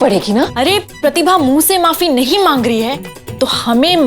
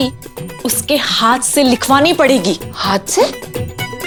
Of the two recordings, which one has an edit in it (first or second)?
first